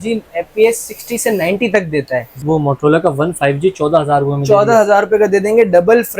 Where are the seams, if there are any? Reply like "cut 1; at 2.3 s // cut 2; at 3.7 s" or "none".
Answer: cut 1; at 2.3 s